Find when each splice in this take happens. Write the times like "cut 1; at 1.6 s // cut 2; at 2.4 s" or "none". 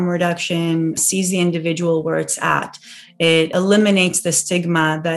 cut 1; at 1.0 s // cut 2; at 3.5 s